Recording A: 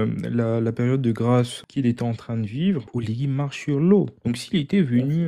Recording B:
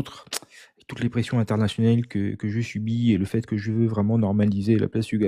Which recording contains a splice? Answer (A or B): A